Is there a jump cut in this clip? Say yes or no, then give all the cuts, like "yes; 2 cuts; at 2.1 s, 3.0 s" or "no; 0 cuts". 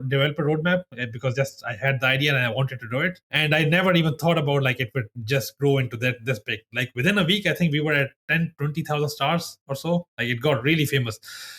yes; 1 cut; at 3.2 s